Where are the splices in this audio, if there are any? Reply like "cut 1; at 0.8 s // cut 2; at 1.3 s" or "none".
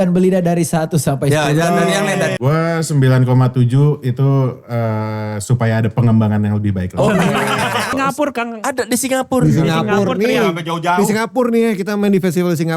cut 1; at 2.3 s // cut 2; at 7.9 s